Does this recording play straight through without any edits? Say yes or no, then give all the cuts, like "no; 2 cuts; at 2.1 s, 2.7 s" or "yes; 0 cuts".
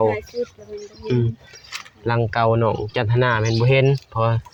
yes; 0 cuts